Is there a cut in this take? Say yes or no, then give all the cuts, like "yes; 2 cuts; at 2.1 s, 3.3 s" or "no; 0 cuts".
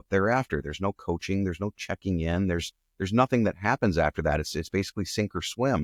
no; 0 cuts